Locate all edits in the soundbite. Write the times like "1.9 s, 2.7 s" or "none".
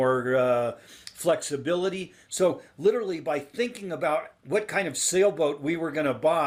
none